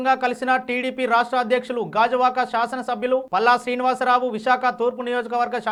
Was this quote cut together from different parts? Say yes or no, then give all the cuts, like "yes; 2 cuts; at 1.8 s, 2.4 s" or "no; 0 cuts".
no; 0 cuts